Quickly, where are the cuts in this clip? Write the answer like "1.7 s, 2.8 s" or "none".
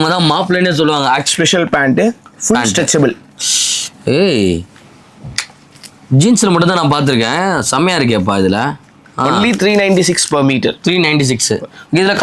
1.3 s